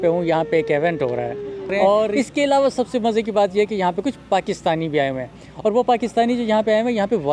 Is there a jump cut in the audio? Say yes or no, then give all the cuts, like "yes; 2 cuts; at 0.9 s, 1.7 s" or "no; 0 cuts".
yes; 1 cut; at 2.1 s